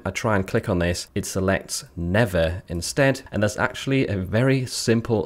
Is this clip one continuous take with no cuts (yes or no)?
no